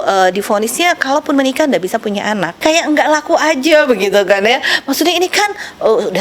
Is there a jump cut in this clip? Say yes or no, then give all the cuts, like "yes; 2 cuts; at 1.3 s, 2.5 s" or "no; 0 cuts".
yes; 1 cut; at 2.6 s